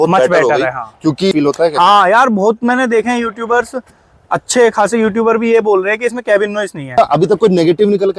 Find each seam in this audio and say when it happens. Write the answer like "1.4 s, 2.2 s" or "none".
1.3 s, 7.0 s